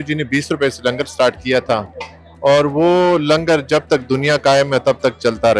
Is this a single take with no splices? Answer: yes; 0 cuts

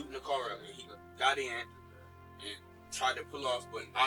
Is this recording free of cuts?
yes; 0 cuts

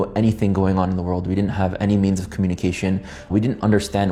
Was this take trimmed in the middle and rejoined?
no; 0 cuts

